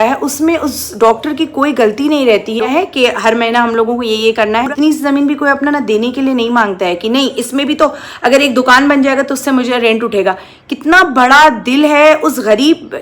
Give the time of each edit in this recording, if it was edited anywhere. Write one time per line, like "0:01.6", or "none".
0:02.7
0:04.7